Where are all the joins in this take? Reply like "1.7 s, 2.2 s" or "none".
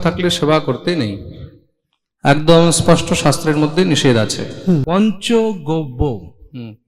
4.8 s